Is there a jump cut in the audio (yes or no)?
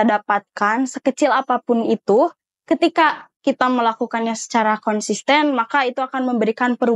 no